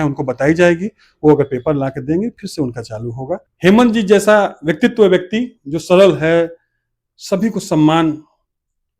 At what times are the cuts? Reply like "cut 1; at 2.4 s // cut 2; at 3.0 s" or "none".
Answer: cut 1; at 3.5 s